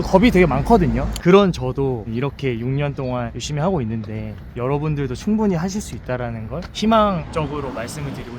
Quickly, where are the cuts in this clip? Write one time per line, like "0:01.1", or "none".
0:07.3